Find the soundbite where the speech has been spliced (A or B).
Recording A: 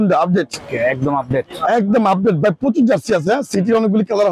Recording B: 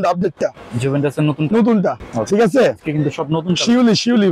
B